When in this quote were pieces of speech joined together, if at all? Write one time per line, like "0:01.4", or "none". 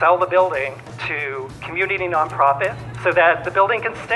0:01.3
0:02.9